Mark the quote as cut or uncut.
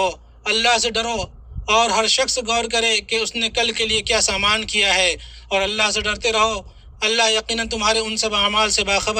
uncut